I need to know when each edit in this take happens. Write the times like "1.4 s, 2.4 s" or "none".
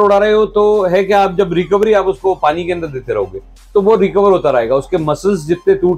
none